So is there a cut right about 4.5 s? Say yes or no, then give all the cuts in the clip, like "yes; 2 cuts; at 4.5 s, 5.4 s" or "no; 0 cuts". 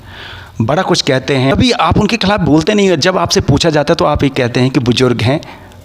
no; 1 cut; at 1.5 s